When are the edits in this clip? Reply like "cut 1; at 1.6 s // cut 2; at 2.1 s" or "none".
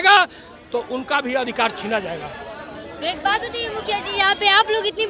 none